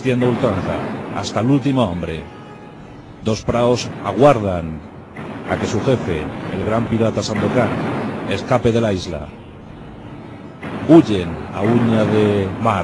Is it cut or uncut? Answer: uncut